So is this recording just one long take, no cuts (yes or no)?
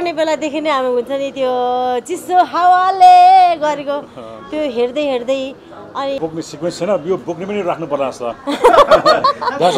no